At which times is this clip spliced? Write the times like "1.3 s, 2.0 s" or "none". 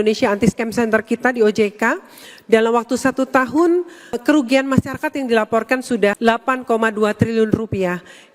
4.2 s, 6.2 s